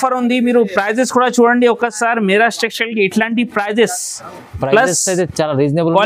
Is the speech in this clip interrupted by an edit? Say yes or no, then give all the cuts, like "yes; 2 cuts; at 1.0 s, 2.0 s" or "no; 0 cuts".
no; 0 cuts